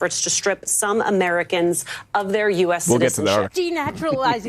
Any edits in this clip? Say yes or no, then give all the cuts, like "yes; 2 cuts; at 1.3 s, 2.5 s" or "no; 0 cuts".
yes; 1 cut; at 3.5 s